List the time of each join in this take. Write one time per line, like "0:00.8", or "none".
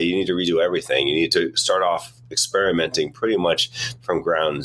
none